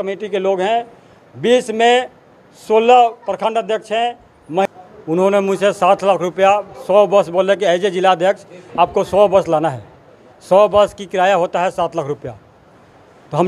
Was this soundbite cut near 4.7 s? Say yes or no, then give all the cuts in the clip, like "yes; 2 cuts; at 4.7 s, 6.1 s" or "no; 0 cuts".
yes; 1 cut; at 4.7 s